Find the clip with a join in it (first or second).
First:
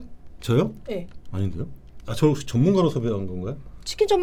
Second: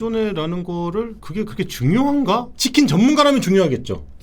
second